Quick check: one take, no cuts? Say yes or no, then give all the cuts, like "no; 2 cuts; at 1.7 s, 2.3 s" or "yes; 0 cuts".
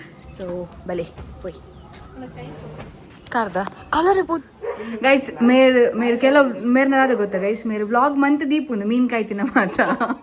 no; 1 cut; at 4.6 s